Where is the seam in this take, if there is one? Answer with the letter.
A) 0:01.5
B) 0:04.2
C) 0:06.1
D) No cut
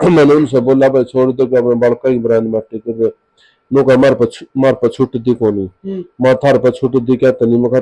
D